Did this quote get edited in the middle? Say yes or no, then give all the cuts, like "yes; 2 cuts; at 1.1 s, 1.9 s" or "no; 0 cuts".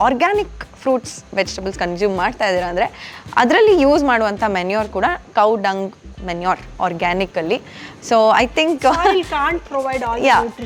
no; 0 cuts